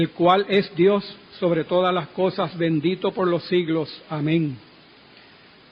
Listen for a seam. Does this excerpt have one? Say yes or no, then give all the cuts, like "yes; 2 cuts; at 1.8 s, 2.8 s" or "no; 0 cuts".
yes; 1 cut; at 3.7 s